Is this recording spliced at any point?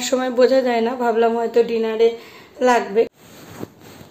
yes; 1 cut; at 3.1 s

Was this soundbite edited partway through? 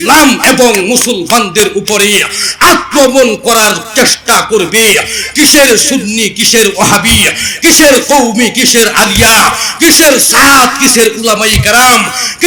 no; 0 cuts

